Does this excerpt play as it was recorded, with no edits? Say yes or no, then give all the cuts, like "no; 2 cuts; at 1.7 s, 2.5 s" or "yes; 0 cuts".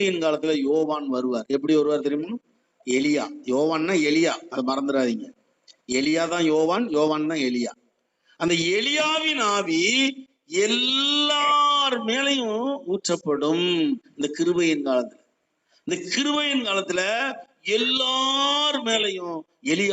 yes; 0 cuts